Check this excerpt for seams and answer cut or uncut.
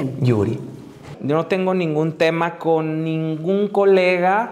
cut